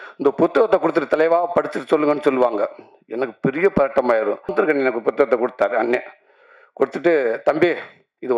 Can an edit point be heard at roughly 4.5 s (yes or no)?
yes